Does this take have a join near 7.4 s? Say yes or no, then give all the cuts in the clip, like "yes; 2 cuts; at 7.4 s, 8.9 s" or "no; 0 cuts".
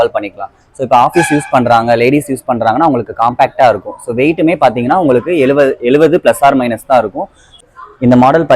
yes; 1 cut; at 7.4 s